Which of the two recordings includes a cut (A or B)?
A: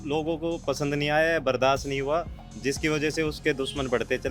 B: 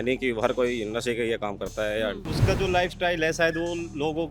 B